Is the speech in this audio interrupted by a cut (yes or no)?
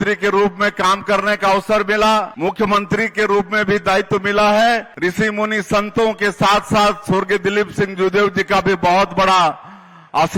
yes